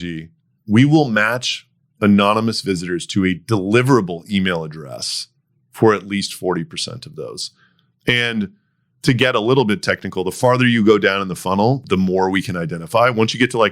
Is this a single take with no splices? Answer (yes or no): no